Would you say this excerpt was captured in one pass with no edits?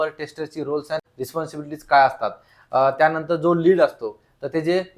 no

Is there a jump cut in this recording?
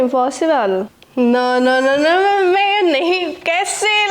yes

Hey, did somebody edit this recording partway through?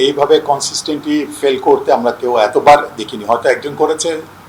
no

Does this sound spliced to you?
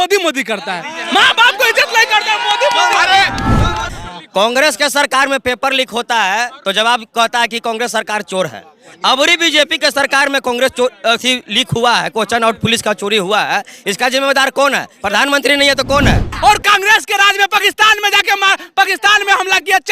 yes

